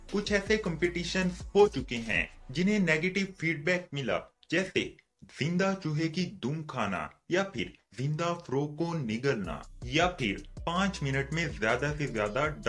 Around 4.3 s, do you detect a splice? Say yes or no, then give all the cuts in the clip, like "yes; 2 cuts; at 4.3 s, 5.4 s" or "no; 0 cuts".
no; 0 cuts